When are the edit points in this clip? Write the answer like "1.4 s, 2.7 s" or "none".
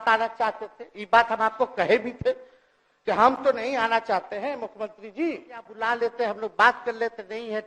5.7 s